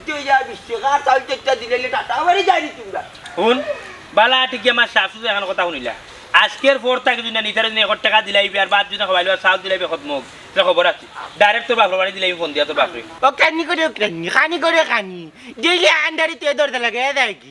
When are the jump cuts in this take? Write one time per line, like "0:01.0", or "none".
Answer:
0:03.1
0:13.0